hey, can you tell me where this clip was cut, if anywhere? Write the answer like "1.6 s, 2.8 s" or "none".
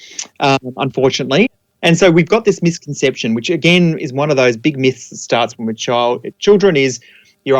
1.5 s

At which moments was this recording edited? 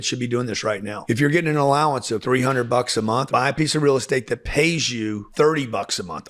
3.2 s

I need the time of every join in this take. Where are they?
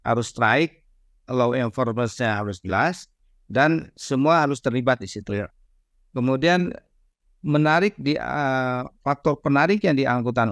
none

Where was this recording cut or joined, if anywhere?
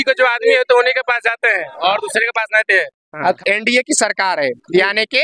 3.4 s

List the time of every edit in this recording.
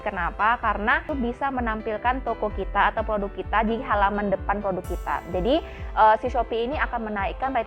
1.1 s

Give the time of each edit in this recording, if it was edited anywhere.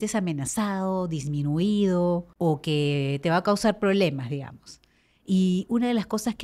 2.3 s

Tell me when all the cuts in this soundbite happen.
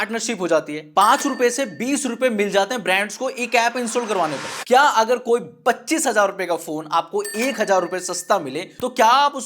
4.5 s

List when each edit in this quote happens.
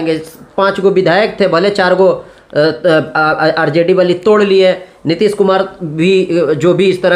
none

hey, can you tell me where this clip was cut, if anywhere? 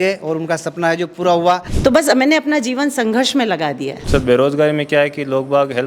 1.7 s, 3.9 s

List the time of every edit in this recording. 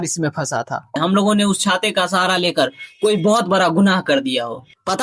1.0 s

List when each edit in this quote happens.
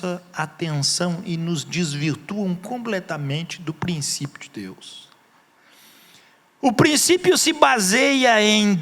5.6 s

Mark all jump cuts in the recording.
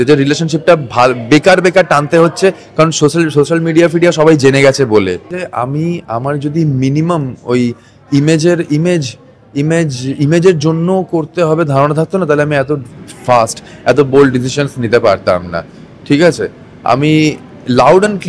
none

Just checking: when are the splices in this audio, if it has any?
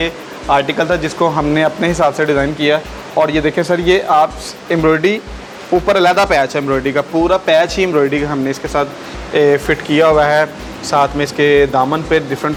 none

